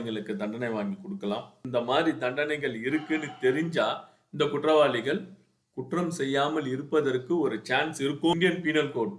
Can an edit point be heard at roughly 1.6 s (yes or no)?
yes